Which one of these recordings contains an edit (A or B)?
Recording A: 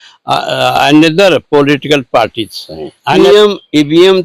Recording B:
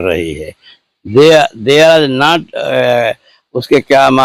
A